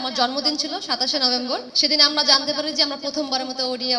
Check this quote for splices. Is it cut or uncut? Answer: cut